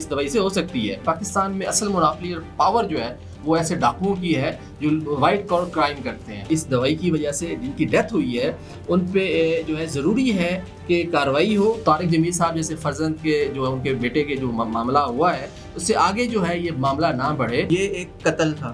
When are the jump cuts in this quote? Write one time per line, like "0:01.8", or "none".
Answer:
0:01.0
0:06.5
0:11.8
0:17.7